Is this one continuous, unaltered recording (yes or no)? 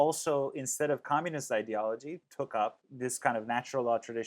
no